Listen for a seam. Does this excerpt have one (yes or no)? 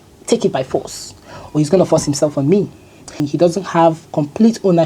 yes